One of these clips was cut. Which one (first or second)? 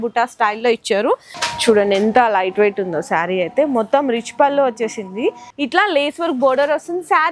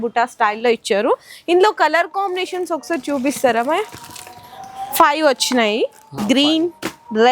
first